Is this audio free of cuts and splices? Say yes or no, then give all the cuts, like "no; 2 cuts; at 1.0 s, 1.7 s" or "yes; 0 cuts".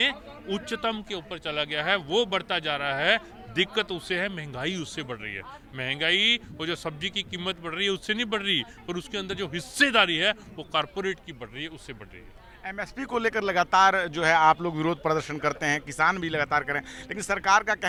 yes; 0 cuts